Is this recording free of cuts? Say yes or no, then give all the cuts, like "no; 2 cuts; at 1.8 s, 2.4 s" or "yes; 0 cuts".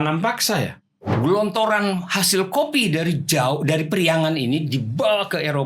no; 1 cut; at 1.1 s